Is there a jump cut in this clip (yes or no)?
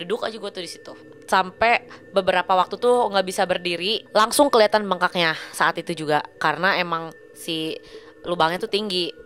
yes